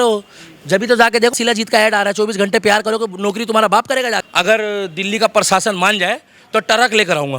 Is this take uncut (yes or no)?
no